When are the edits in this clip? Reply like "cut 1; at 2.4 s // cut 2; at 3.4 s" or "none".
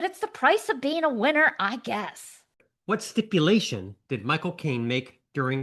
cut 1; at 2.7 s